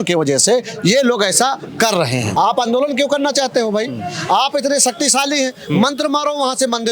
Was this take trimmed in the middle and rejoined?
yes; 1 cut; at 2.3 s

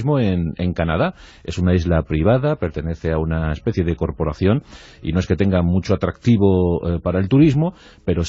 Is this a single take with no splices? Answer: yes; 0 cuts

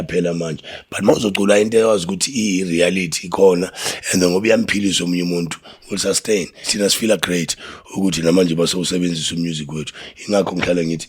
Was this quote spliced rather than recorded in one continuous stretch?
yes; 1 cut; at 6.7 s

